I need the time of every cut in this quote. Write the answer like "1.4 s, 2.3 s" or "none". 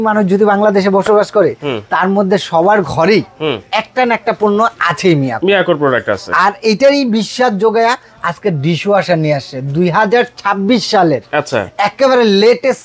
none